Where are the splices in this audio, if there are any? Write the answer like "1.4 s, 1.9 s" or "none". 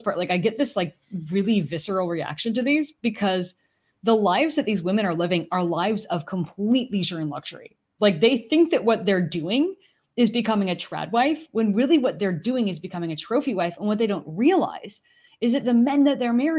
none